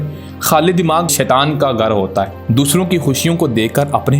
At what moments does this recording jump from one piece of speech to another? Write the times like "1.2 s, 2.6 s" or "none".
1.1 s, 2.3 s